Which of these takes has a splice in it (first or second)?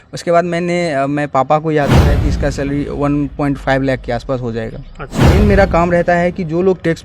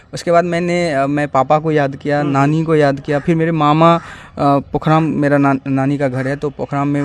first